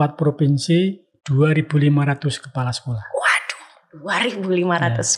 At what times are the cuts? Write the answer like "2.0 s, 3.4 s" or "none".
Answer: none